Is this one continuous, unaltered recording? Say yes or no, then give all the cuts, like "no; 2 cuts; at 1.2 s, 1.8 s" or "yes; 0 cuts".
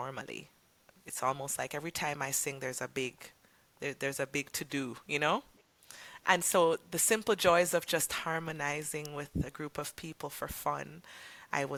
yes; 0 cuts